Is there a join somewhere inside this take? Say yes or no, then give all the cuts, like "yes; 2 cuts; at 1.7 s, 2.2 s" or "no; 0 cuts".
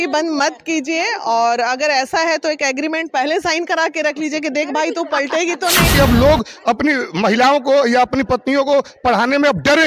yes; 1 cut; at 5.9 s